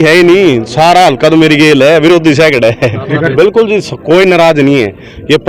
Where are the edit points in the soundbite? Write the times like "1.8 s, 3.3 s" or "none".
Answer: 3.3 s